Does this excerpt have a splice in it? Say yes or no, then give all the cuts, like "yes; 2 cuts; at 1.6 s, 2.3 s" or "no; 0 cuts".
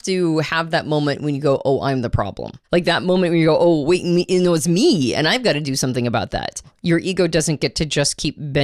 yes; 2 cuts; at 2.5 s, 6.7 s